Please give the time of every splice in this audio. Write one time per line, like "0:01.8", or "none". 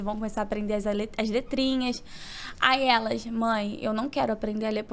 none